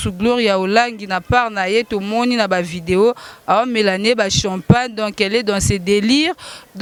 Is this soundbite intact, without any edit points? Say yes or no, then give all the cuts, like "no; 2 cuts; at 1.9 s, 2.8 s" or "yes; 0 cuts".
yes; 0 cuts